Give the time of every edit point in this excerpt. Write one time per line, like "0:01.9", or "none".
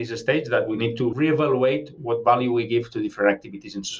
0:01.1
0:01.9